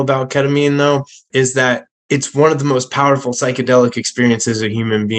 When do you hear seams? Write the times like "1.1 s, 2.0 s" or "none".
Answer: 1.3 s

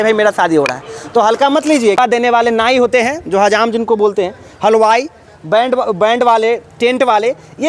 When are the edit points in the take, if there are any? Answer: 2.0 s

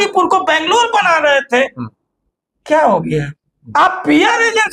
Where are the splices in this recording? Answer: 3.5 s

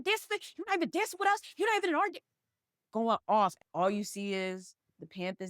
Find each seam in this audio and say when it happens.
3.6 s

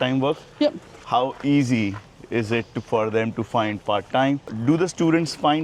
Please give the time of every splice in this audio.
4.4 s

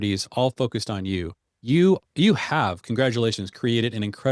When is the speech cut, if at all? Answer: none

